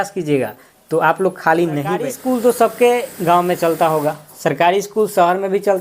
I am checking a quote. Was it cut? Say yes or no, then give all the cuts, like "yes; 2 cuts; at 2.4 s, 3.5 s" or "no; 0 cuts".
yes; 1 cut; at 2.0 s